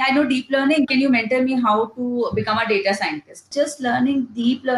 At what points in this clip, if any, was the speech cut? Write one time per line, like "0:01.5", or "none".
0:00.9
0:03.5